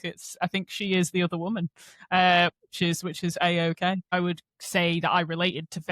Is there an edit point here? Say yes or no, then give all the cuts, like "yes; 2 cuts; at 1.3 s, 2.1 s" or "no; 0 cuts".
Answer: yes; 1 cut; at 4.1 s